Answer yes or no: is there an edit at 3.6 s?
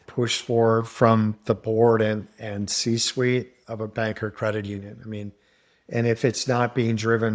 yes